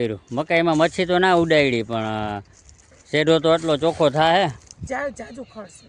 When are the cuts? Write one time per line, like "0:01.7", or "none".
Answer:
0:04.9

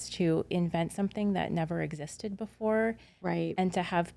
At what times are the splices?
none

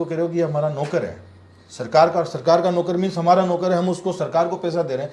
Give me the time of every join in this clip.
none

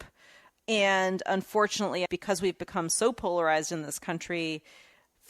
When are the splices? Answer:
0:02.0

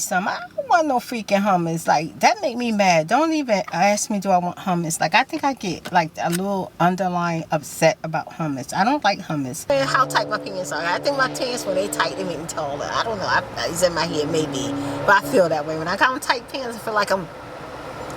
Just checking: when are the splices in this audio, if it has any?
0:09.7

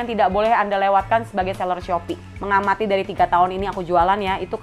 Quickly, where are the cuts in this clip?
0:02.6

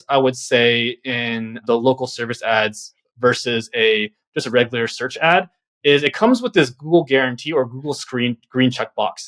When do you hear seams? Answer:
none

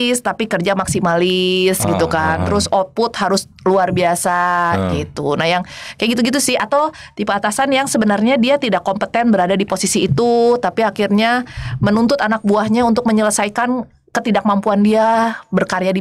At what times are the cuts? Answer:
none

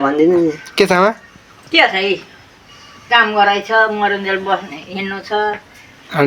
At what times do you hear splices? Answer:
none

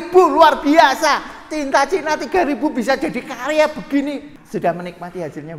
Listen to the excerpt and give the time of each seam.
0:04.3

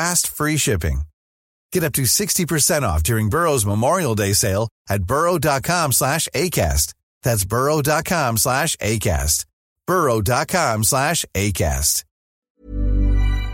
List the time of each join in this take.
0:12.5

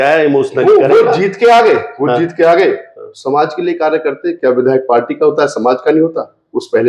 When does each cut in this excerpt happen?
none

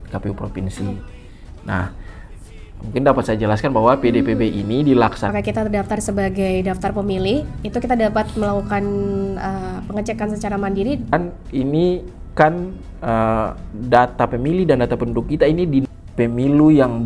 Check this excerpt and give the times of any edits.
0:05.3
0:11.1
0:15.8

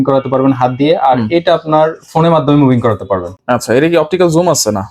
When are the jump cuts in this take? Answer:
none

